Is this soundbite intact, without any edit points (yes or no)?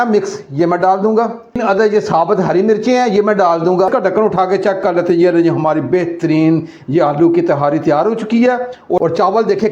no